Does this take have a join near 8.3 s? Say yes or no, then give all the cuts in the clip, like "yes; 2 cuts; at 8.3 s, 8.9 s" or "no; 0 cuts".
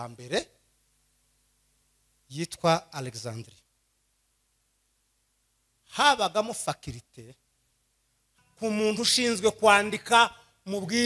yes; 1 cut; at 8.3 s